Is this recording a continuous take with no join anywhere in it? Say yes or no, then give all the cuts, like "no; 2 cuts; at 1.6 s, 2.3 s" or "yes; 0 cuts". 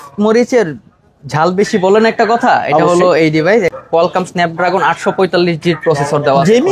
no; 1 cut; at 3.7 s